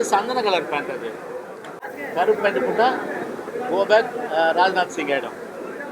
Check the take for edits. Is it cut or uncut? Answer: cut